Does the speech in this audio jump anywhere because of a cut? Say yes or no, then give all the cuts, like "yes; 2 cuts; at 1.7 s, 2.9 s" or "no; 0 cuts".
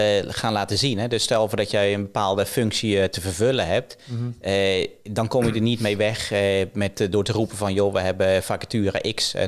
no; 0 cuts